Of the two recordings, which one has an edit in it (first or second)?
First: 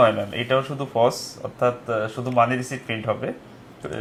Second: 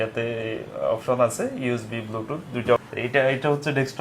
second